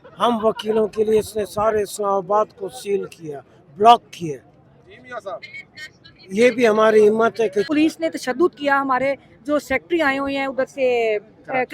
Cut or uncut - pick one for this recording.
cut